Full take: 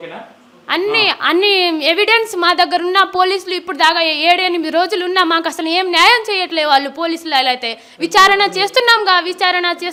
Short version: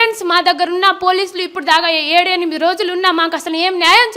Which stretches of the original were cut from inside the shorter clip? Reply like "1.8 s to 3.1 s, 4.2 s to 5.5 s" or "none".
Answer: none